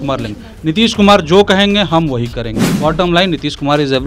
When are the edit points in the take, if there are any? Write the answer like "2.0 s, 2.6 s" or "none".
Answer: 2.7 s